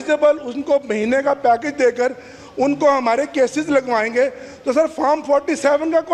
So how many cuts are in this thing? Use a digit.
0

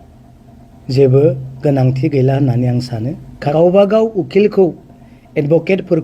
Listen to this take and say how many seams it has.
1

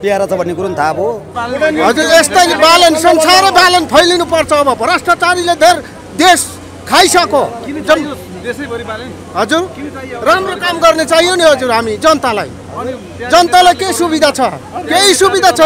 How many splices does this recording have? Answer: 1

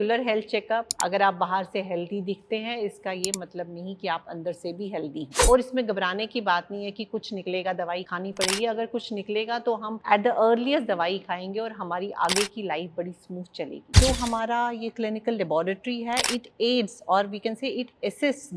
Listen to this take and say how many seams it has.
5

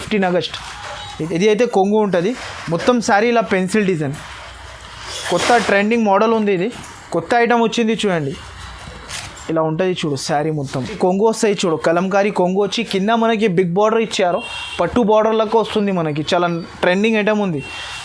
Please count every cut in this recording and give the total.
2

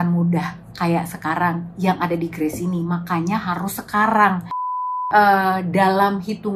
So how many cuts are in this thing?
1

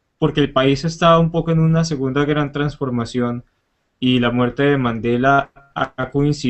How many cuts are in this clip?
0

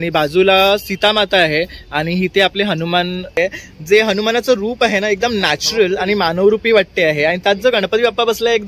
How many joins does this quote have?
1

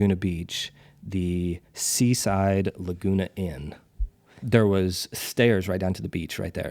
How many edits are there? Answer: 1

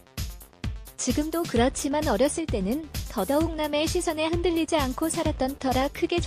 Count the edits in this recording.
1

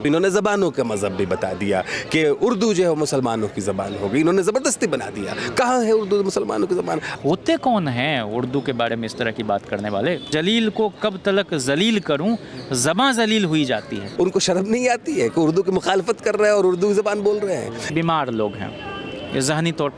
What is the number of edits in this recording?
4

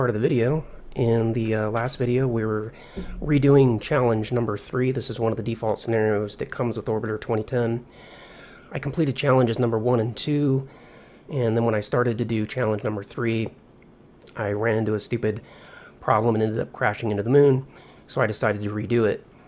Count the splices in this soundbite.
0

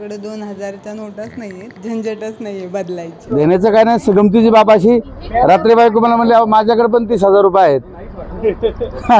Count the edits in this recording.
2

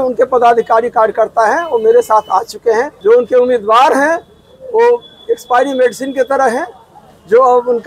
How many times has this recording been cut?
1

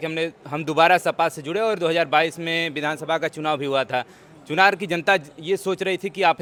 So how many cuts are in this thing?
0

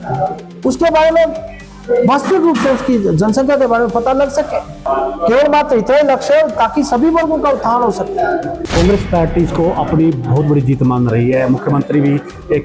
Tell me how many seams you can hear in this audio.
2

